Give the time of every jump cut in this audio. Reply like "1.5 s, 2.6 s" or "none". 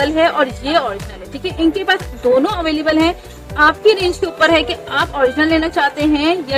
none